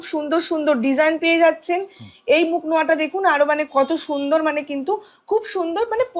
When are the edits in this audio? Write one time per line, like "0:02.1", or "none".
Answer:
none